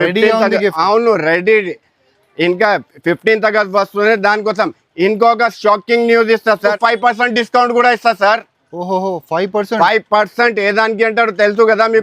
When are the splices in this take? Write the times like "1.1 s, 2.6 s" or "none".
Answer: 6.8 s